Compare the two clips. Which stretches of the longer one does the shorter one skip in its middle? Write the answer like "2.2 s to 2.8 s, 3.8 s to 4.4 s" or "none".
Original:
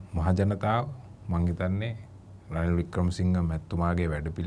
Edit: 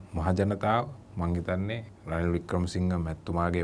1.0 s to 1.1 s, 2.0 s to 2.4 s